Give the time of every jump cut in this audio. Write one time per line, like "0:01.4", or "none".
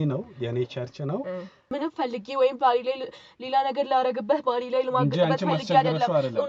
0:01.7